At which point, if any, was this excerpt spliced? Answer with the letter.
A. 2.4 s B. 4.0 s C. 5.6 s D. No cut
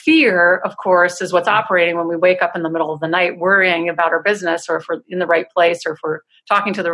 D